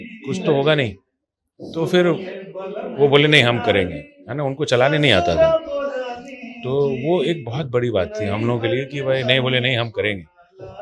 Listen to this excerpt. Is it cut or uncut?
uncut